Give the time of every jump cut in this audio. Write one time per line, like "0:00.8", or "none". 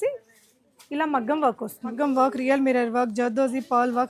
0:01.9